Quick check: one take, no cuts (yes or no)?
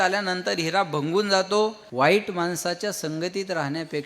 no